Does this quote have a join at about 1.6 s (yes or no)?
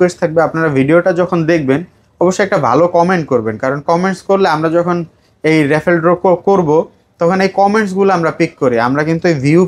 no